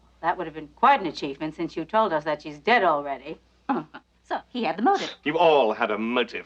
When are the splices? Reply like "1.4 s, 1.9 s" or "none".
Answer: 5.4 s